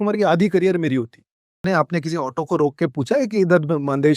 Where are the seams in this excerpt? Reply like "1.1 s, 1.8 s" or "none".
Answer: 1.6 s